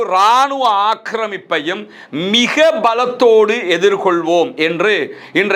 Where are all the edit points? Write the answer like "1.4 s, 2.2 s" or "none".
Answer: none